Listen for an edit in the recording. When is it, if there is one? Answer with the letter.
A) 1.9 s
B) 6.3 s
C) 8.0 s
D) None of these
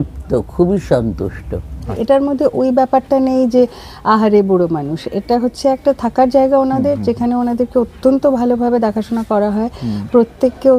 A